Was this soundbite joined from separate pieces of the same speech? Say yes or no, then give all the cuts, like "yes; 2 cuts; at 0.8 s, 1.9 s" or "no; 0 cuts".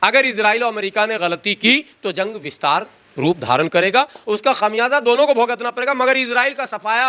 no; 0 cuts